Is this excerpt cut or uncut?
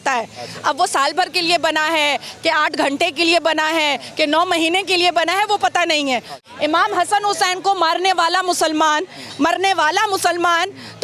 cut